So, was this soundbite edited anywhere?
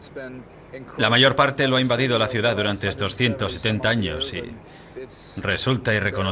yes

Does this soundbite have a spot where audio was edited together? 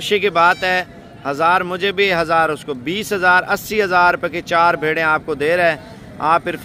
no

